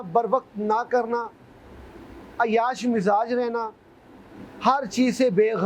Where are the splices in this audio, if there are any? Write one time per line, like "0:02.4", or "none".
none